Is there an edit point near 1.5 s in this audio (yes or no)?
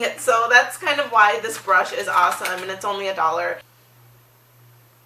no